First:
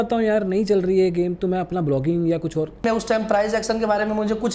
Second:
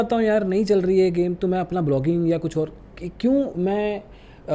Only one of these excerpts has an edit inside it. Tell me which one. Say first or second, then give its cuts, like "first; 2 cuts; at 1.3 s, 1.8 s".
first; 1 cut; at 2.8 s